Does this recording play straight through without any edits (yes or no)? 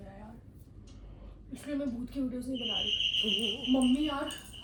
yes